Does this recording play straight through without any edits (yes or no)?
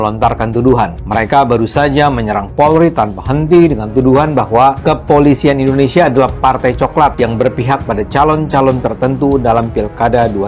no